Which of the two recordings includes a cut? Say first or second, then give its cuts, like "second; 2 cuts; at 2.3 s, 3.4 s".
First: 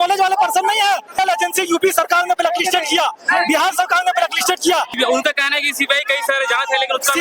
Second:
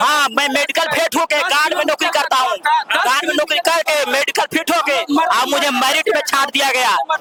first; 2 cuts; at 1.2 s, 4.9 s